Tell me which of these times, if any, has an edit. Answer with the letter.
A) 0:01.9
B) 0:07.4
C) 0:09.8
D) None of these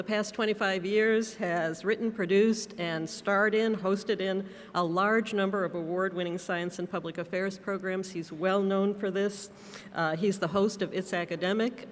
A